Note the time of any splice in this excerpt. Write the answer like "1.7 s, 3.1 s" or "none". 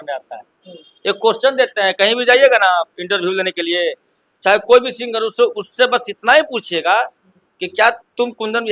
none